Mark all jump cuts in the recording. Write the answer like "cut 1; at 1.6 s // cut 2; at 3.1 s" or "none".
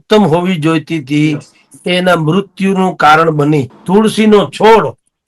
cut 1; at 3.8 s